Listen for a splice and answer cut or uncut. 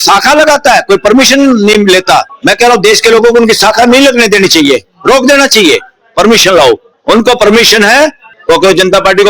cut